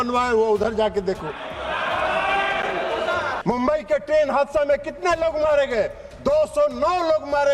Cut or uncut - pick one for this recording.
cut